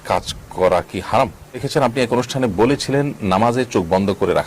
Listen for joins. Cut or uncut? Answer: cut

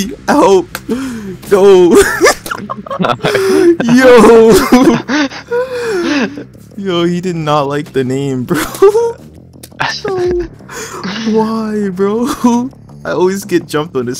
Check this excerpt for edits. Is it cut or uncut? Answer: uncut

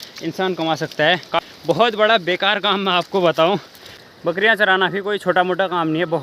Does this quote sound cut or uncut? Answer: cut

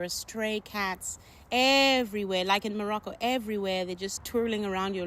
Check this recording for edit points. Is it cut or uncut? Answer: cut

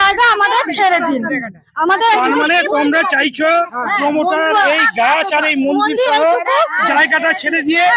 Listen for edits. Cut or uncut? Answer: uncut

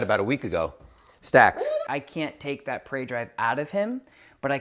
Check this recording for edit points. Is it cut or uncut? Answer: cut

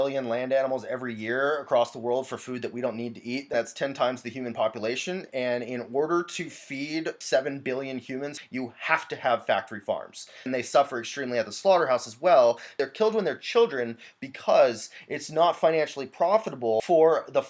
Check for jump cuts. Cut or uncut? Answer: cut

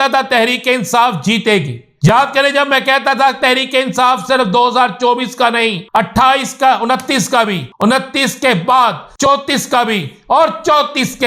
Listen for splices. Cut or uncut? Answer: cut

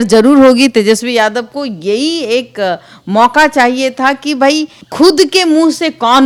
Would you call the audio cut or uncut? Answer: uncut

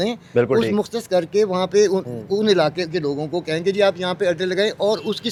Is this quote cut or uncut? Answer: uncut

